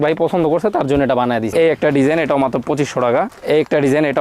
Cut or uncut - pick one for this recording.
cut